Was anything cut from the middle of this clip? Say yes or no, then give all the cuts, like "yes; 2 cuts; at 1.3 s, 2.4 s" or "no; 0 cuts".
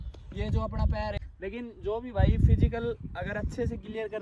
yes; 1 cut; at 1.2 s